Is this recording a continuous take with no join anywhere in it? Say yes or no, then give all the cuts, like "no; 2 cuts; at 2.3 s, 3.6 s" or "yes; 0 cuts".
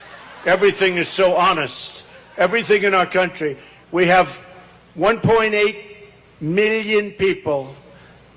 yes; 0 cuts